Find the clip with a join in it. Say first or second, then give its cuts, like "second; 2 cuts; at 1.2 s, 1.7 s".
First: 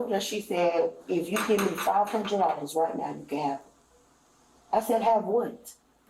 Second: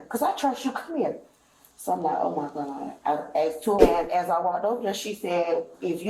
second; 1 cut; at 3.8 s